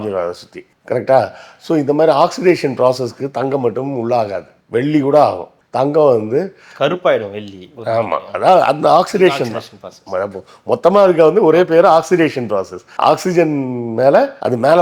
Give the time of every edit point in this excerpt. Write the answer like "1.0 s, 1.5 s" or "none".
none